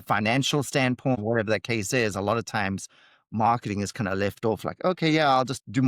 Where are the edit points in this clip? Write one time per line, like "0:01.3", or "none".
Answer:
0:01.2